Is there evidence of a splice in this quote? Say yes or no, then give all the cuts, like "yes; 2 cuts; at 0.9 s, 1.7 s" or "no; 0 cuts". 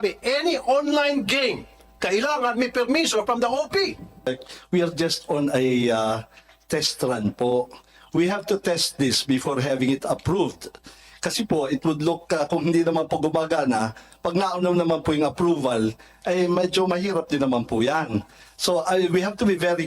yes; 1 cut; at 4.3 s